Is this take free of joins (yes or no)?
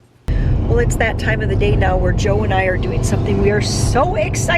yes